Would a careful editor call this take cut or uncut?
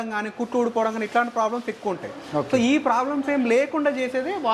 uncut